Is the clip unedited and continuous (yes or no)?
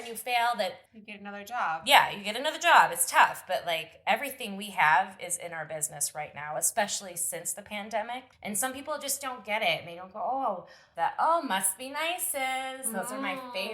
no